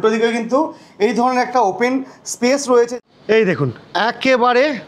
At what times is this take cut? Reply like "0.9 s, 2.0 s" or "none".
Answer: 2.9 s